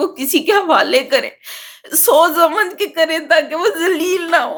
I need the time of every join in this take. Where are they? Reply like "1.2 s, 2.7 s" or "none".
none